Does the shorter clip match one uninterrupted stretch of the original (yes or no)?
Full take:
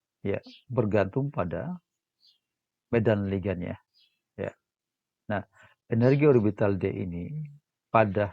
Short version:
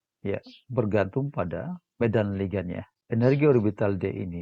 no